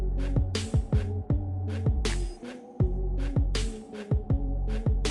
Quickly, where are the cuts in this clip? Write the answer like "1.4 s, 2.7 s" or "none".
none

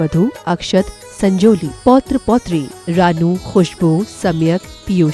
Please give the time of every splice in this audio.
none

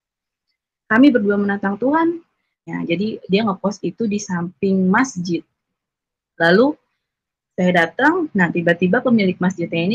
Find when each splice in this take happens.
2.6 s

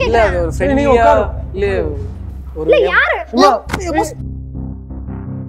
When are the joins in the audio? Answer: none

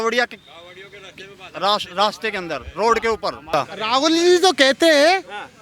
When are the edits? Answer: 3.5 s

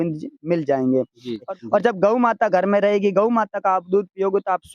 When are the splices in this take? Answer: 1.5 s

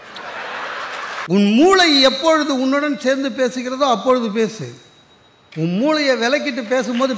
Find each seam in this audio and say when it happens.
1.3 s

